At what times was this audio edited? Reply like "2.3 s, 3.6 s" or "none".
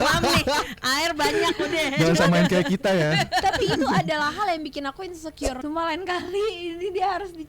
5.6 s